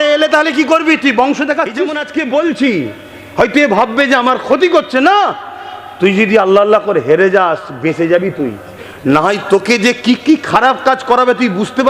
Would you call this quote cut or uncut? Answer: cut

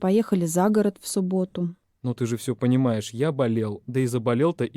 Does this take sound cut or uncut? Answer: cut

